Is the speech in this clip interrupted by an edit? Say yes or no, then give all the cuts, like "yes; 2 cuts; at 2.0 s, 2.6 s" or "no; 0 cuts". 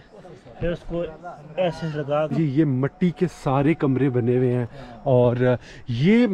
yes; 1 cut; at 2.3 s